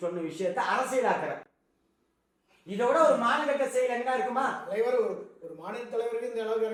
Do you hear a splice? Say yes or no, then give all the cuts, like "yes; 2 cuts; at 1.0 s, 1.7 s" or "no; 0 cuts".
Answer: no; 0 cuts